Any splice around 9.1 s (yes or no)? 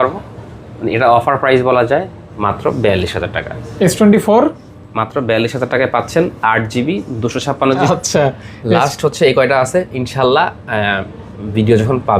no